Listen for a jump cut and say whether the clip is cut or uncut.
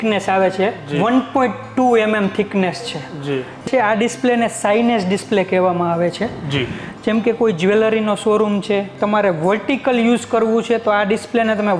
cut